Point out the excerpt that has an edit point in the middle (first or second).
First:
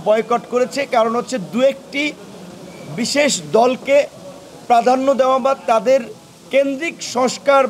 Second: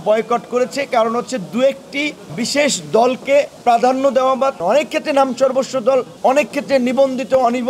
second